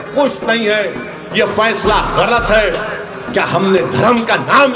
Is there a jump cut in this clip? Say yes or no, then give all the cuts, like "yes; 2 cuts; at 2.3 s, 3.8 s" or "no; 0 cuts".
no; 0 cuts